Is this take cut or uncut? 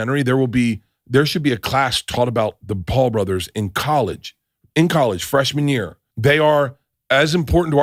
uncut